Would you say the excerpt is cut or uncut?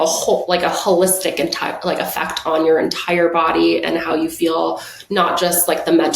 uncut